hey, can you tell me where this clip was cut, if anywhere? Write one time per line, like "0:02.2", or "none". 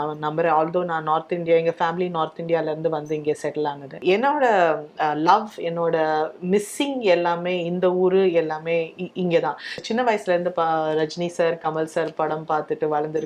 0:03.9
0:09.8